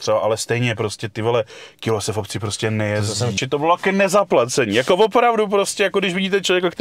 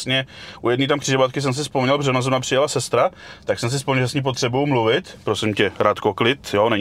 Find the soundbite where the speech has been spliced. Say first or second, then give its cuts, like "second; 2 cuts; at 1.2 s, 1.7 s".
first; 1 cut; at 3.4 s